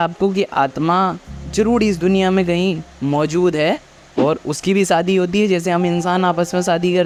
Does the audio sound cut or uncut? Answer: uncut